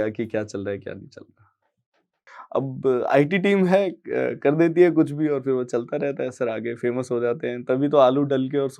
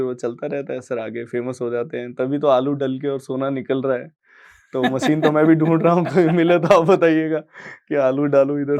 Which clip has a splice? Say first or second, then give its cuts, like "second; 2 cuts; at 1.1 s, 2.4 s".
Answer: first; 1 cut; at 2.3 s